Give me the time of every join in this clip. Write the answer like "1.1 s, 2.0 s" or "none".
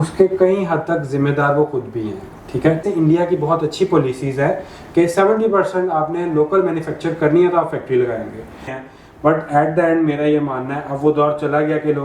2.8 s, 8.7 s